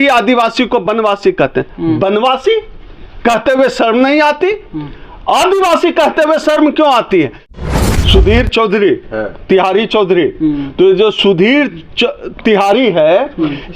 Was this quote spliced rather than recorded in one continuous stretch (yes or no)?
yes